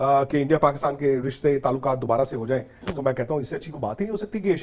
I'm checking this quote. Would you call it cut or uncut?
uncut